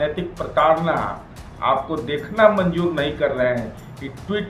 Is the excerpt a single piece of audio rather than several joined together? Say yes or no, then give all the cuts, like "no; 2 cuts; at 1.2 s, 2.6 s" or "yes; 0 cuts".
yes; 0 cuts